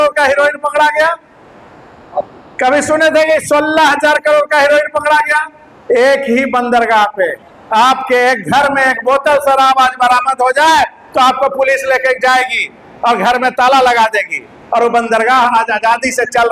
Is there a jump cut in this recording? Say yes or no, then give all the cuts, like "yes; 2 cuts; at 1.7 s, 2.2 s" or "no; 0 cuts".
no; 0 cuts